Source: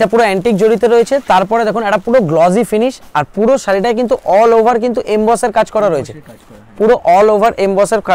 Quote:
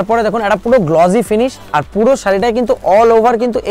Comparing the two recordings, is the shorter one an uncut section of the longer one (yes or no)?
yes